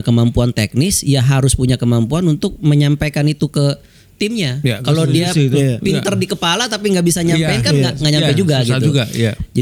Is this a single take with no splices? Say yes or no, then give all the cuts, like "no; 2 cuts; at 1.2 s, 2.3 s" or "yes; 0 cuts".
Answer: yes; 0 cuts